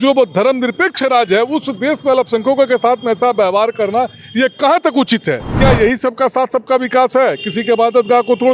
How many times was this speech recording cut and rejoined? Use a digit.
1